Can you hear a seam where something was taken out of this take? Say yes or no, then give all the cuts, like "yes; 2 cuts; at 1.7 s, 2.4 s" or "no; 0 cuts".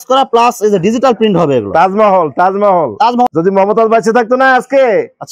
yes; 1 cut; at 3.3 s